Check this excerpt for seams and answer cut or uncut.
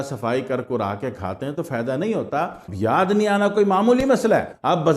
cut